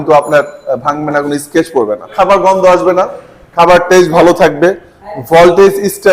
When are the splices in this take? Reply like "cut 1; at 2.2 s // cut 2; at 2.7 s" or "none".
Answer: cut 1; at 2.1 s